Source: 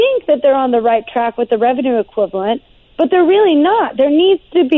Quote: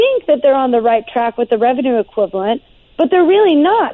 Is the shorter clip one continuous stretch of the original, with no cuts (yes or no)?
yes